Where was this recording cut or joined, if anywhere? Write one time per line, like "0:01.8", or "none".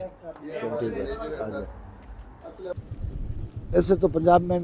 0:02.8